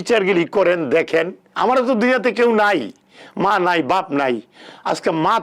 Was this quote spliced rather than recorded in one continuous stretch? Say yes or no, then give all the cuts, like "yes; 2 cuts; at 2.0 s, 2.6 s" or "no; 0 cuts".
yes; 1 cut; at 1.4 s